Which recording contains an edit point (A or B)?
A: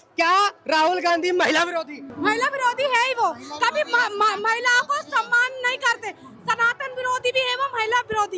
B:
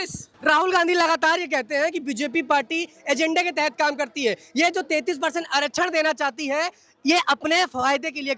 A